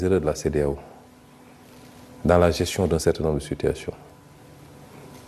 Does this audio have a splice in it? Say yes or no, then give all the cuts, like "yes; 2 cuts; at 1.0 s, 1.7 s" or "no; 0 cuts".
no; 0 cuts